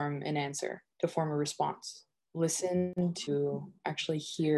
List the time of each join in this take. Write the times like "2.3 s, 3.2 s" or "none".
2.9 s